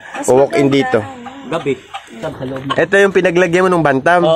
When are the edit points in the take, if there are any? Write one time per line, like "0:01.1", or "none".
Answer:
0:02.1